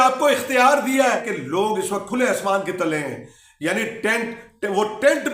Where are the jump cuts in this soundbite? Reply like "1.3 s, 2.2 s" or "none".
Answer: 1.3 s

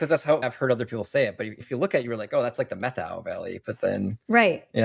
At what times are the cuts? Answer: 1.6 s

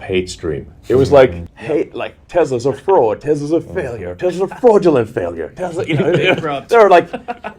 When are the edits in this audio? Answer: 1.5 s

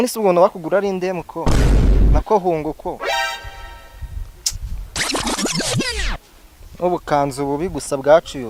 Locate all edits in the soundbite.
none

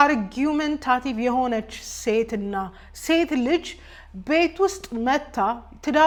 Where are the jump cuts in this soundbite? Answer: none

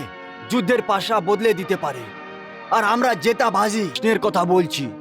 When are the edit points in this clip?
3.9 s

